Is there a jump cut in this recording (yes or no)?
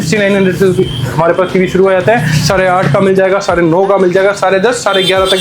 no